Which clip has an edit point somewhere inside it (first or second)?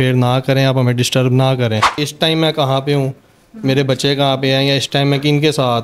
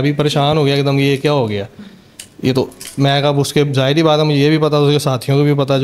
first